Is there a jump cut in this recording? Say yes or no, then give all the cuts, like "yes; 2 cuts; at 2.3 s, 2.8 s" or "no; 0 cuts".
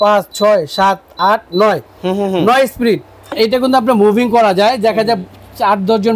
yes; 1 cut; at 3.3 s